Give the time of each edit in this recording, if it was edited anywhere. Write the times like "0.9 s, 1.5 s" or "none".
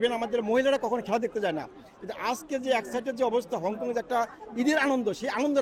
none